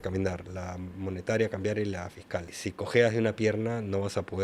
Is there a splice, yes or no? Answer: no